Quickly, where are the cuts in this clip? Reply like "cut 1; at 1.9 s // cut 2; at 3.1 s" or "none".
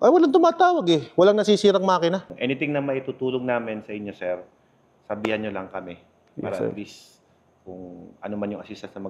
cut 1; at 2.2 s

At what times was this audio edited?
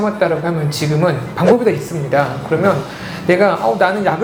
none

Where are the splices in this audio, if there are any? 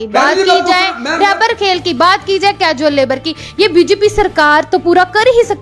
none

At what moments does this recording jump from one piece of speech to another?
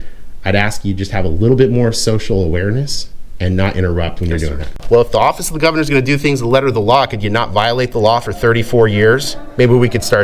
cut 1; at 4.8 s

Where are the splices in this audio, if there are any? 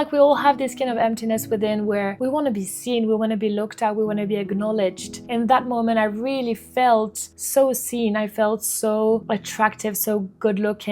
cut 1; at 2.1 s

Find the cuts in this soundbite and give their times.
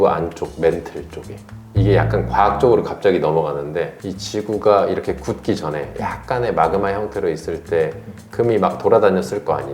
cut 1; at 1.6 s

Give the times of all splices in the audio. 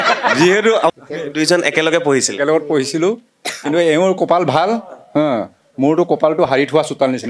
cut 1; at 0.9 s

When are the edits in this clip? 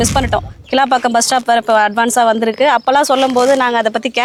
none

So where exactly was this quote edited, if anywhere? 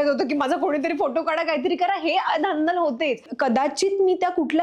cut 1; at 3.3 s

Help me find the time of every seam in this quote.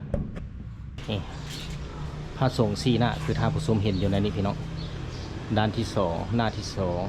cut 1; at 1.0 s

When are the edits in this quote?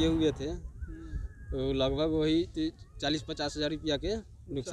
none

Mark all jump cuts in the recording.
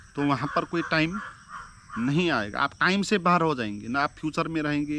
none

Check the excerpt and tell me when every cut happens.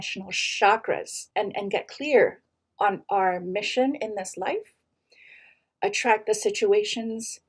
cut 1; at 1.2 s

